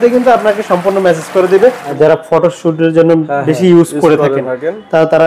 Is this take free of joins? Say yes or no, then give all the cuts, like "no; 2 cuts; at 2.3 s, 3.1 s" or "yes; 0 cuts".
no; 1 cut; at 1.9 s